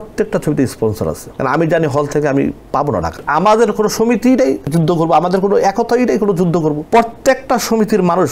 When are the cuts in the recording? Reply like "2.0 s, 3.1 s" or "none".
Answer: 1.3 s, 3.2 s, 4.7 s, 6.8 s

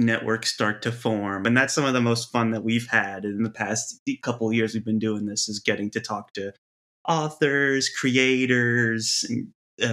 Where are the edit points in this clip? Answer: 1.4 s

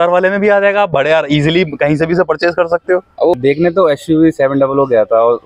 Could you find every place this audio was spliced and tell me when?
3.3 s

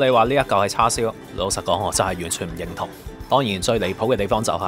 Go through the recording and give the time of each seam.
3.2 s

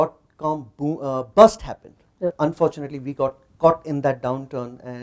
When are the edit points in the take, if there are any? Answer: 2.3 s

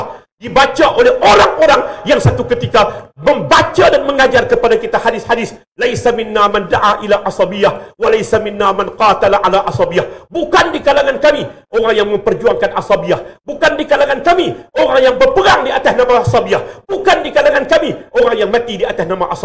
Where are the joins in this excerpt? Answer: none

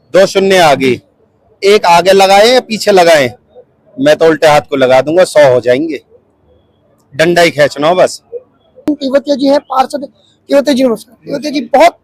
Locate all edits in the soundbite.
none

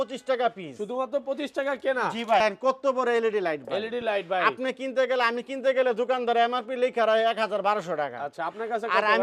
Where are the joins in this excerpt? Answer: 2.4 s

